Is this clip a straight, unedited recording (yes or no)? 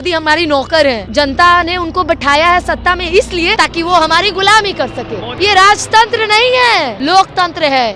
no